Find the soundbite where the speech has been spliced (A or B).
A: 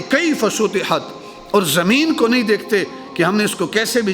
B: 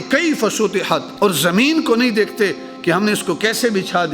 B